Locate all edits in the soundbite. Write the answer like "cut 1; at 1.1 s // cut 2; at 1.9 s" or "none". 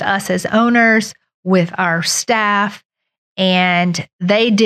none